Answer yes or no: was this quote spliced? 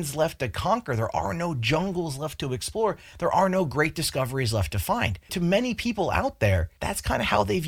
yes